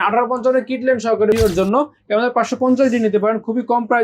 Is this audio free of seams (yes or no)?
no